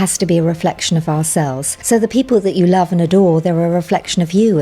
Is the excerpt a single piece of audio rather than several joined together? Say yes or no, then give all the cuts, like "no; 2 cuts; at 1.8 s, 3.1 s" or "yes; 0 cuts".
no; 1 cut; at 1.7 s